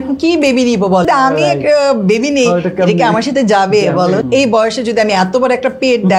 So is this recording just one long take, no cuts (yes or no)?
no